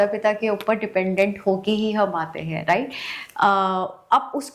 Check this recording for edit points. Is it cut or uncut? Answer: uncut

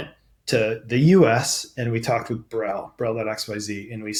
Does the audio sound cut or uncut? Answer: uncut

